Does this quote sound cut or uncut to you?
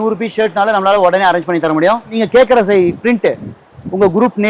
cut